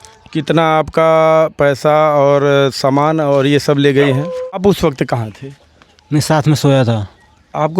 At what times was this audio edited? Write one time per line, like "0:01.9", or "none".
0:04.6